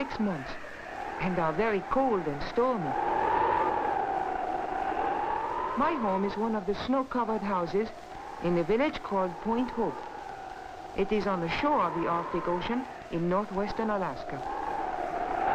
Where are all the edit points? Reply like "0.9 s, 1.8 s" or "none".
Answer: 2.2 s